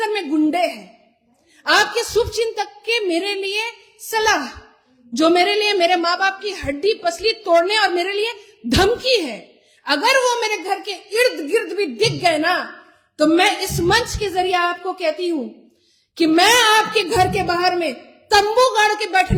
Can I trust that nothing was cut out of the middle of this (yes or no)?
yes